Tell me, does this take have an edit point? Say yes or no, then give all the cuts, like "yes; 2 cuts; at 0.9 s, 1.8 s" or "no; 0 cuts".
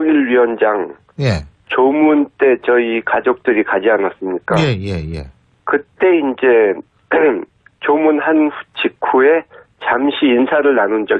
no; 0 cuts